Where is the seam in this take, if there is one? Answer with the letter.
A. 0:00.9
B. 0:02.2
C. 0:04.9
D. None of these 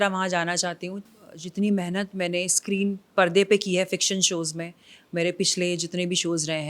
A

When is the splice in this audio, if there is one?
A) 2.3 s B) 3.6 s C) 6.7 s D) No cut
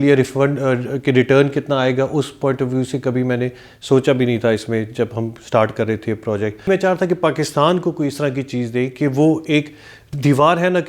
C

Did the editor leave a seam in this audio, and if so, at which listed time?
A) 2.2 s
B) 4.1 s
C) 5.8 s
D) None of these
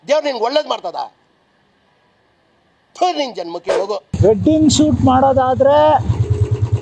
B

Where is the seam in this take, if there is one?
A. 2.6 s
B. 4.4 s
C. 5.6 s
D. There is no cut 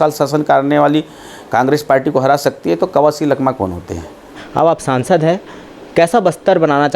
B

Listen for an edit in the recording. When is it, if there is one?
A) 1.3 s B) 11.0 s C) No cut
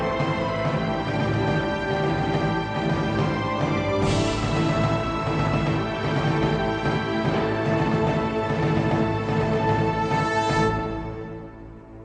B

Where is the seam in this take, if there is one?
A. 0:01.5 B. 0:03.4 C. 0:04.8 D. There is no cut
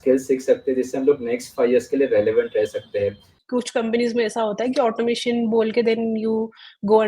B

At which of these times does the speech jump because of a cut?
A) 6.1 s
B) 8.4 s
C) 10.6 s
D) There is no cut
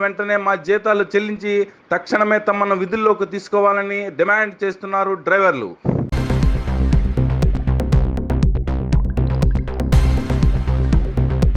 A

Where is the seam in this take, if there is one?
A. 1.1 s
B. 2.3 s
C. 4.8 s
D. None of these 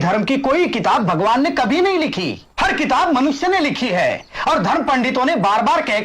D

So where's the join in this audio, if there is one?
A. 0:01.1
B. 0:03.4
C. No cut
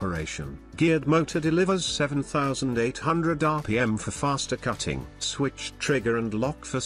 C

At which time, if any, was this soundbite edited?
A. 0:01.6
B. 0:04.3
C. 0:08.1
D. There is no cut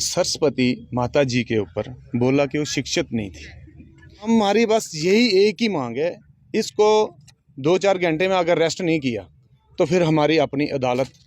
B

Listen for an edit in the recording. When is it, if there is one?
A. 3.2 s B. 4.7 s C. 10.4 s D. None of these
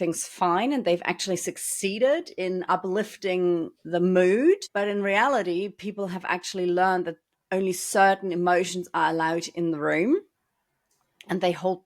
B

